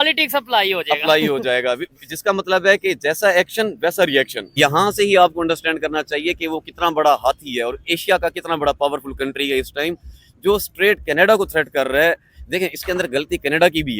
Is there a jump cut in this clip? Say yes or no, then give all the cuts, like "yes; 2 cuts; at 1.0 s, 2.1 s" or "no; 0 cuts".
yes; 1 cut; at 4.4 s